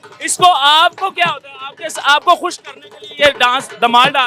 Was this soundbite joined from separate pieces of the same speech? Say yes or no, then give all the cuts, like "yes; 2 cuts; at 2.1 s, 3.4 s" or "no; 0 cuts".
no; 0 cuts